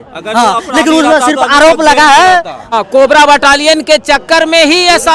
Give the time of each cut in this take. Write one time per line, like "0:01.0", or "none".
0:02.7